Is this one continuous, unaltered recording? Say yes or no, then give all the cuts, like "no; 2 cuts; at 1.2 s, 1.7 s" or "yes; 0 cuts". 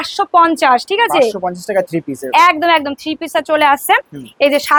yes; 0 cuts